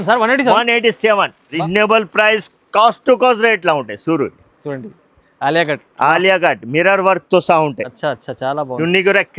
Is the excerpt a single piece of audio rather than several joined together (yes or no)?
no